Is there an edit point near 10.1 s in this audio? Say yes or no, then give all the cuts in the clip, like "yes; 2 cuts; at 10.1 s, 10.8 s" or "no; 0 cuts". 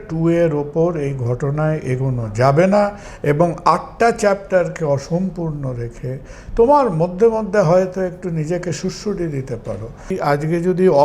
yes; 1 cut; at 10.1 s